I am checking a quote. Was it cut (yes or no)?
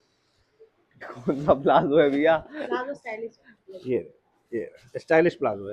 yes